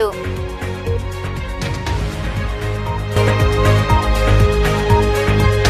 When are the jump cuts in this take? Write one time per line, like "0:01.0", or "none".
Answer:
none